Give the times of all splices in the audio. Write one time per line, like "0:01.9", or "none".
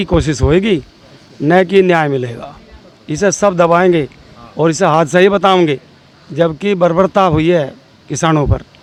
none